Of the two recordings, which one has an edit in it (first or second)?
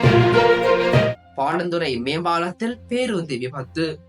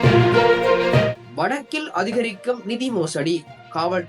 second